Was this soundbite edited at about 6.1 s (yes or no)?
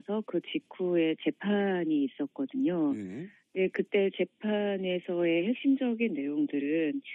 no